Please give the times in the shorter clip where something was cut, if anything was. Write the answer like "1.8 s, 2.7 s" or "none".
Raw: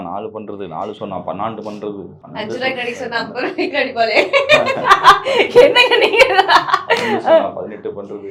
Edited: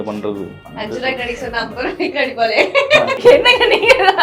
3.2 s